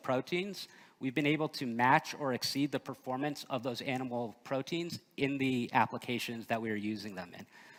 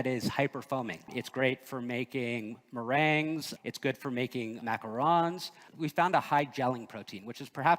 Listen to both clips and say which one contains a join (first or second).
second